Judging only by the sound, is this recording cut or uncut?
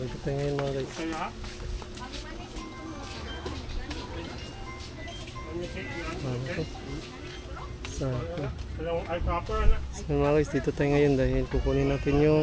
uncut